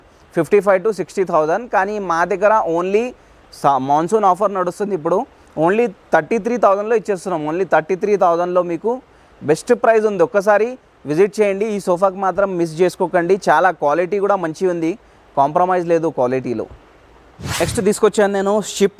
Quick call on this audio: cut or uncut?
uncut